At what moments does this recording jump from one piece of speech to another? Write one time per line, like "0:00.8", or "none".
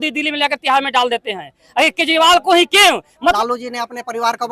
0:03.4

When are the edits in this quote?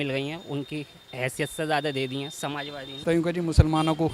0:01.0
0:02.8

